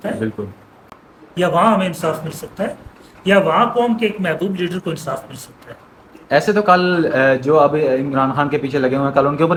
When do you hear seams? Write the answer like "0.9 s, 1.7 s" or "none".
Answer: none